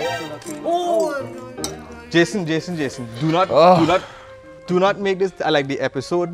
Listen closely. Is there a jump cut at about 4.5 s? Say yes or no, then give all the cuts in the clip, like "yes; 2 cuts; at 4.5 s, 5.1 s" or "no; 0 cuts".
no; 0 cuts